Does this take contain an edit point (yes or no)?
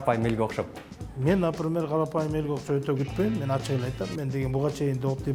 no